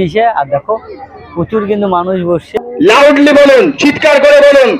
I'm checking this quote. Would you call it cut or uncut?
cut